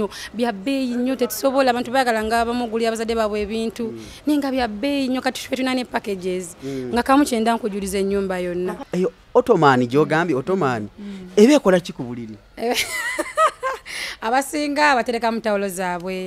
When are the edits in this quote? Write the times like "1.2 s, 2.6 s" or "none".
8.8 s